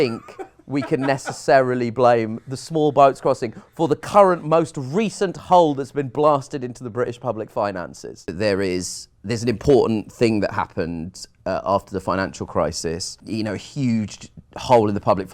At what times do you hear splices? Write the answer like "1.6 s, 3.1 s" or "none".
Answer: 8.3 s, 13.1 s